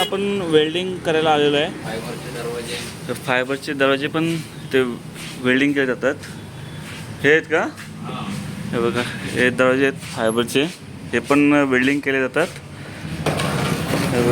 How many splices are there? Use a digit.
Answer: 1